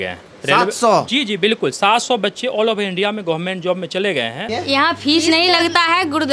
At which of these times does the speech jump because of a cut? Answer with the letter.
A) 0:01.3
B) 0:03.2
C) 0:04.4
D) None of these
C